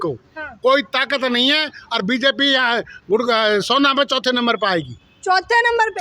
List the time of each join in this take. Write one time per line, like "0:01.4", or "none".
none